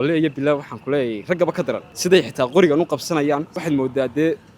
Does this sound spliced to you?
yes; 2 cuts; at 1.9 s, 3.5 s

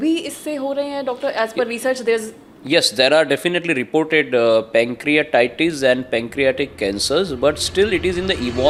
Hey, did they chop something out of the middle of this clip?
no; 0 cuts

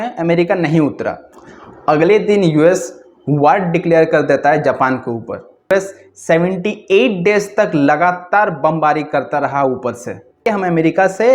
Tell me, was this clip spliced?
yes; 3 cuts; at 1.2 s, 5.7 s, 10.4 s

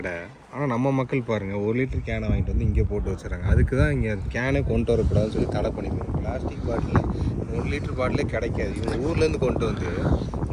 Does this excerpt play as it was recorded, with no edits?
yes; 0 cuts

